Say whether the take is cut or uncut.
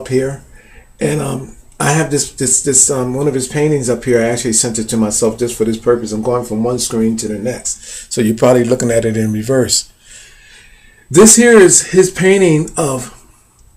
uncut